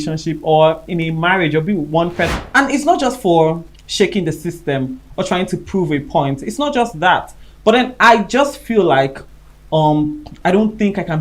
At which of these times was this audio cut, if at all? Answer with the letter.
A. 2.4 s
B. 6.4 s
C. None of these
A